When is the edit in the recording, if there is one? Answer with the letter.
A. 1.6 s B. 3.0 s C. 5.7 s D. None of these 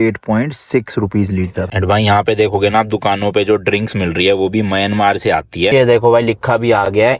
C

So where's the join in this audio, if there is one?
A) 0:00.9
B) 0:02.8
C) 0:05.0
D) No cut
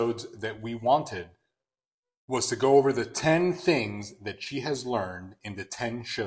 D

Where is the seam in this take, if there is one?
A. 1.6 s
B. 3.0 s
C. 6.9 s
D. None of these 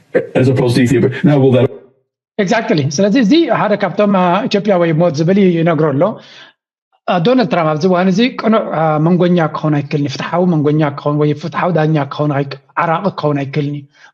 D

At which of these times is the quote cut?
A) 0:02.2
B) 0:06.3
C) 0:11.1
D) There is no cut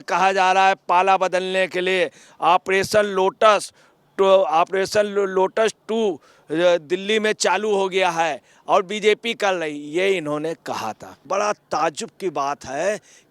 C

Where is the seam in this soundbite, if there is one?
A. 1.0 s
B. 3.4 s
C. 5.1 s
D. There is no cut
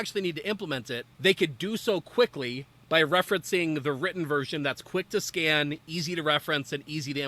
A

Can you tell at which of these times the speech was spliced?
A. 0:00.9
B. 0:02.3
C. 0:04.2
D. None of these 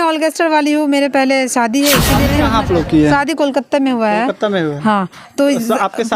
B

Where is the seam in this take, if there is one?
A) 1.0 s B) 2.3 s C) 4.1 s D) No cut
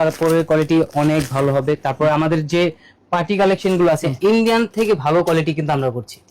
C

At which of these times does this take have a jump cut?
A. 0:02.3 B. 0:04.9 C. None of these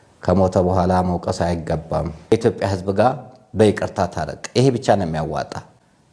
A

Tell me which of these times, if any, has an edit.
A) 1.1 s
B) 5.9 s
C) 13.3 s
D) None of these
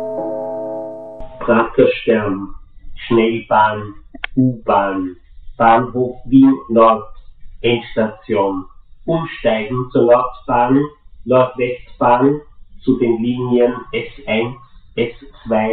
A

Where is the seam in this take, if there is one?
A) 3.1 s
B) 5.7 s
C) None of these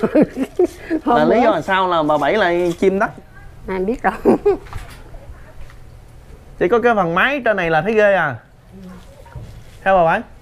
A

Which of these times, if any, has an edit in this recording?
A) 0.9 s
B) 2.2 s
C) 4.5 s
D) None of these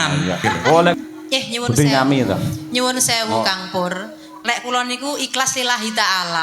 A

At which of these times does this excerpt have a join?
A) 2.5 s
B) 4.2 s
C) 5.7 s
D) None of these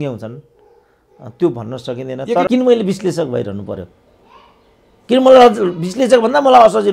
A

